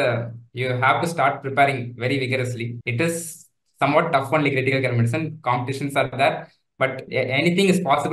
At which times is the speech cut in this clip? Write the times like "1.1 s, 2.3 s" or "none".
2.8 s, 7.0 s